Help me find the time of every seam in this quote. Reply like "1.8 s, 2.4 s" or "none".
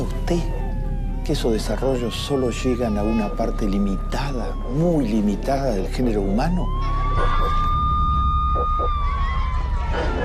6.4 s